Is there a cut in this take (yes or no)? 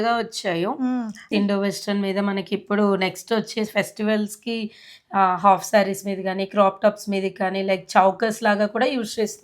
yes